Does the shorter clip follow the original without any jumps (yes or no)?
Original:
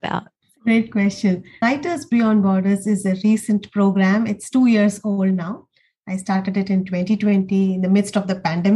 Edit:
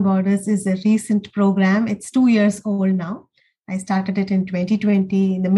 yes